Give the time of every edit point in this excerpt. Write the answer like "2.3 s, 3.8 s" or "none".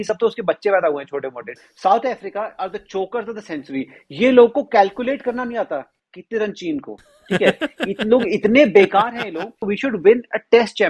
1.5 s, 9.7 s